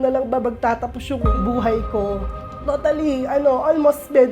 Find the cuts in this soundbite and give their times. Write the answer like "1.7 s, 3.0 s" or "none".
2.3 s